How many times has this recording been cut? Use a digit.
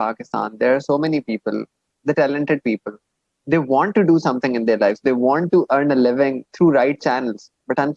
1